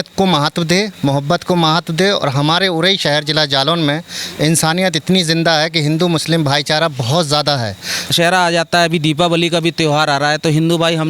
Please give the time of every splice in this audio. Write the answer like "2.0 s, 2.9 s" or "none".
8.1 s